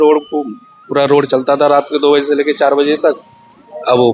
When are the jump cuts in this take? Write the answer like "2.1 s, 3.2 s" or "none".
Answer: none